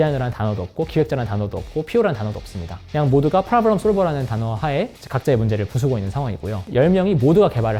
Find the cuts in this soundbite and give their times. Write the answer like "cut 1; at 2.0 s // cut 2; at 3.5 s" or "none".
none